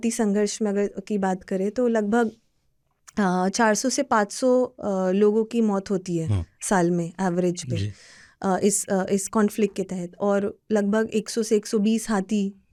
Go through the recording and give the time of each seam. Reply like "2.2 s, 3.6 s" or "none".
none